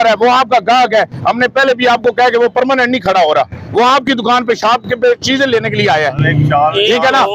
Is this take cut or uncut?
uncut